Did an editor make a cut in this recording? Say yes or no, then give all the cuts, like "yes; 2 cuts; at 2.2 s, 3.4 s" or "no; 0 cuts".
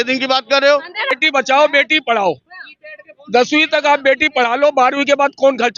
yes; 1 cut; at 1.1 s